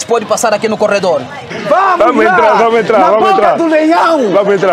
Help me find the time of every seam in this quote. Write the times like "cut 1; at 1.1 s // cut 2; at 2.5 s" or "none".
cut 1; at 1.4 s